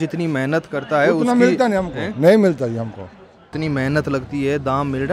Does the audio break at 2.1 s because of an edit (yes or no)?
no